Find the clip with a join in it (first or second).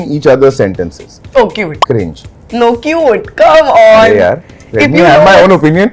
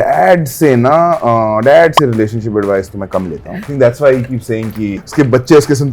second